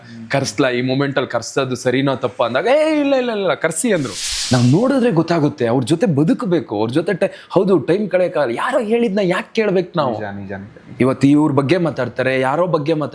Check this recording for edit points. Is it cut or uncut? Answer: cut